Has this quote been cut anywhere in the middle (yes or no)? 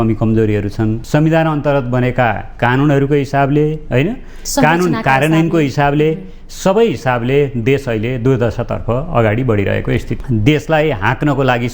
yes